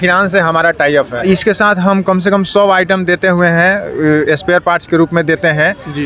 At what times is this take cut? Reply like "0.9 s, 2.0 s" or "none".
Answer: 1.2 s

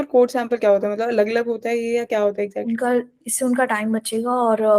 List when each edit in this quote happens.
2.6 s

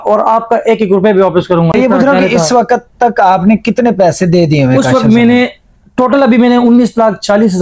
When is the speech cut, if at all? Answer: 1.7 s

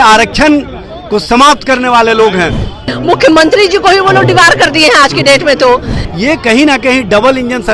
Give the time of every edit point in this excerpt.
2.9 s, 6.0 s

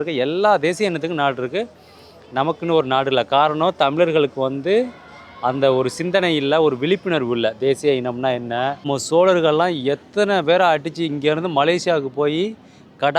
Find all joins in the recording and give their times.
8.8 s

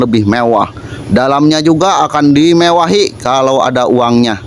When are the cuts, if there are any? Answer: none

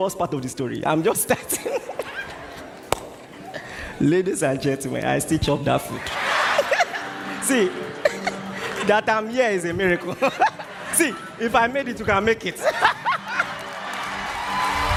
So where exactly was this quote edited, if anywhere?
none

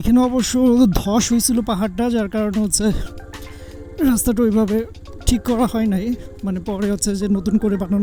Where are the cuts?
none

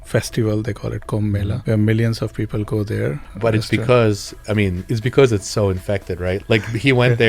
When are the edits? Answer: 1.5 s, 3.7 s, 6.4 s

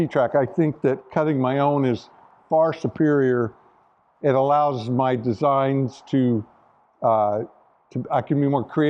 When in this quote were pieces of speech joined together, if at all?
none

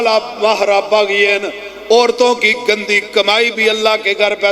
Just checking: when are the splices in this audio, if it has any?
none

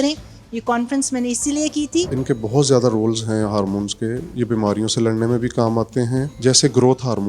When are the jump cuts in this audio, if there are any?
2.2 s, 6.3 s

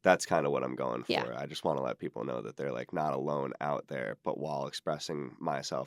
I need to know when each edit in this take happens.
none

